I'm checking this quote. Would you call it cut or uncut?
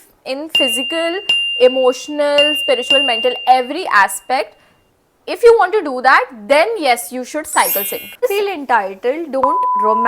cut